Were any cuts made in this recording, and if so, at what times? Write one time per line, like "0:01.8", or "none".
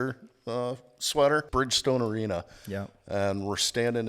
0:01.5